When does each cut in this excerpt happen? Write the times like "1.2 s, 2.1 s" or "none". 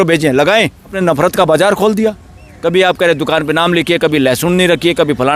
1.0 s